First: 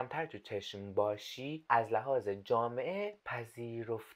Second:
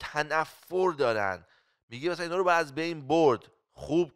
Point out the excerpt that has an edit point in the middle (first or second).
first